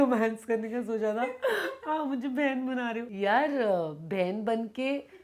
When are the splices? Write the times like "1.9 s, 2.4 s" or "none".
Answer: 3.1 s